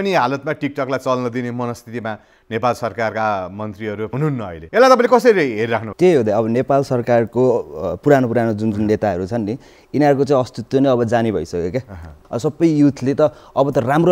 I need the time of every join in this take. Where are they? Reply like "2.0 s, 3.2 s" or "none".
12.2 s